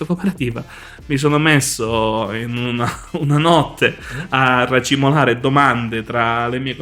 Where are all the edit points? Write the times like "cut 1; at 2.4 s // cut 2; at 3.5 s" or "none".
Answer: none